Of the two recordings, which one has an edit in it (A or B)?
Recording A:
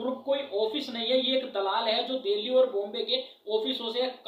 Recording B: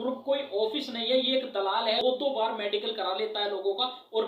B